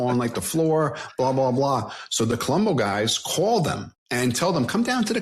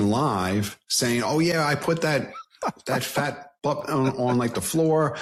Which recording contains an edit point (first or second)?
first